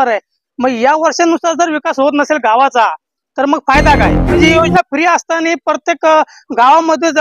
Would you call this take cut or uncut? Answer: cut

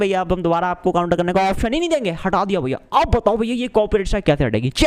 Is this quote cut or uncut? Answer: uncut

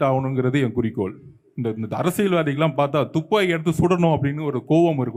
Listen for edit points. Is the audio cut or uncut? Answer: uncut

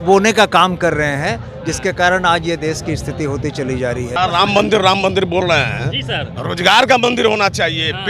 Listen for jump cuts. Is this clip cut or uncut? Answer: cut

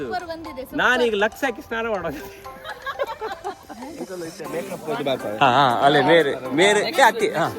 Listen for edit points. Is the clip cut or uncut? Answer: cut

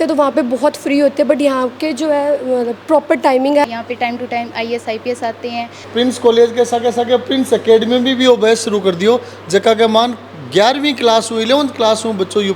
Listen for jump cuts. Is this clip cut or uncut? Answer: cut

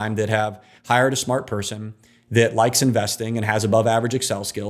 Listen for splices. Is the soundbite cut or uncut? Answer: uncut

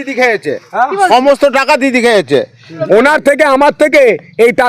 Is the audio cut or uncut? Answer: cut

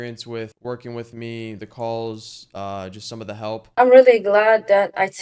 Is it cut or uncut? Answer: uncut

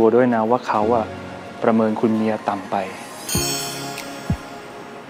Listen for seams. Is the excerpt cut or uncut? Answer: uncut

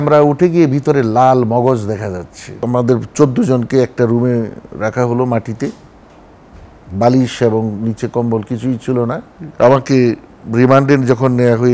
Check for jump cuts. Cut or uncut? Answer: cut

